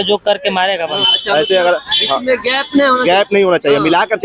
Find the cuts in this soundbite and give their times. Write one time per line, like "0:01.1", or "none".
0:01.0